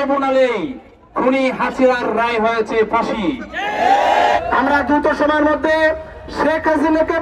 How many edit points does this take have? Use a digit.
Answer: 1